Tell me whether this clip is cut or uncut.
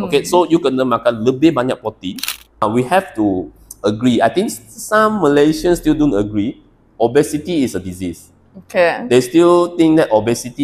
cut